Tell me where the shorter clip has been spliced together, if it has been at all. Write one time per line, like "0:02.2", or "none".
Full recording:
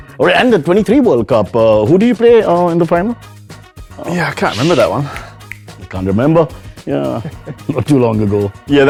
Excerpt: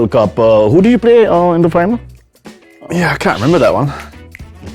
none